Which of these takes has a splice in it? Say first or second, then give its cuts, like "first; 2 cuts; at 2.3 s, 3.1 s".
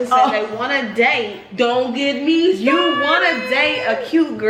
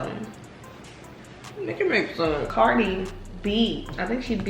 second; 1 cut; at 2.5 s